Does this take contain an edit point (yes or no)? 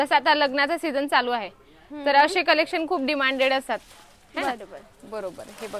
no